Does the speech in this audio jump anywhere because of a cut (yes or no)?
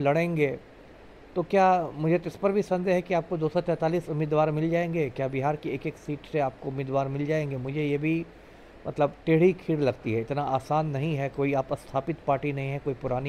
no